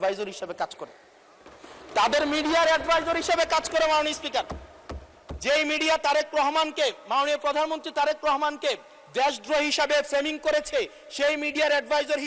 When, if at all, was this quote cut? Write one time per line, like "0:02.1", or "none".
none